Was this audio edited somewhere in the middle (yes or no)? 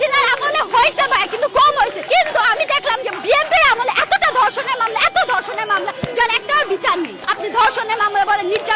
yes